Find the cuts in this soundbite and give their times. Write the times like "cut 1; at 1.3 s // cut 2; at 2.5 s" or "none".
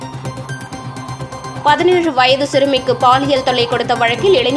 cut 1; at 1.6 s